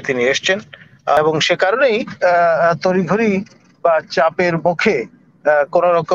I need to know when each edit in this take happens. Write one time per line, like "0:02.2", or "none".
0:01.2